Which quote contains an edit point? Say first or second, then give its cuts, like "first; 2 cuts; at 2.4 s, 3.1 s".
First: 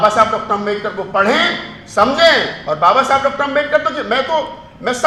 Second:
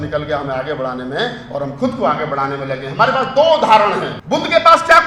second; 1 cut; at 4.1 s